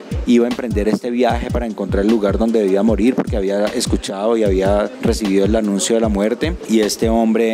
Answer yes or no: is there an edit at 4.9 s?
yes